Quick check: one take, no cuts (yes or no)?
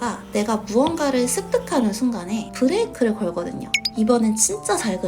no